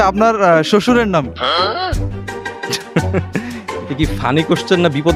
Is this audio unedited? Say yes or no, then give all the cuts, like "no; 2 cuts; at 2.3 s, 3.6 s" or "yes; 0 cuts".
yes; 0 cuts